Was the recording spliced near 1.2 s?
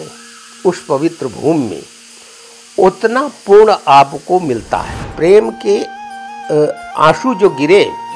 no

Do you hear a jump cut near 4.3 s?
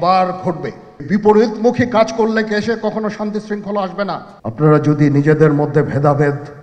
yes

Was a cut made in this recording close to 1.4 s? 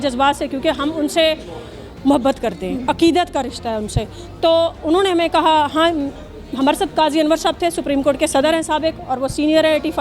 no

